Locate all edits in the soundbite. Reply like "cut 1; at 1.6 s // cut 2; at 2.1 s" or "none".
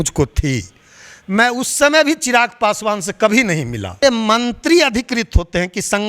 cut 1; at 4.0 s